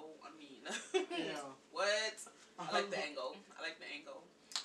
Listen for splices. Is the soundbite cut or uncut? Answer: uncut